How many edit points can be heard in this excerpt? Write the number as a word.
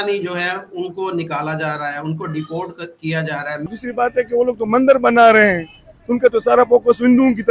one